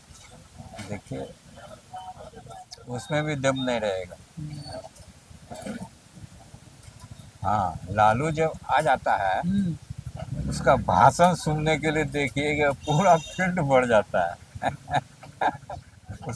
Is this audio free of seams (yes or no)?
yes